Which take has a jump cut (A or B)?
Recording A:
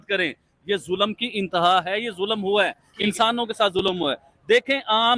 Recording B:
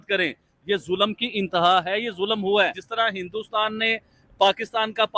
B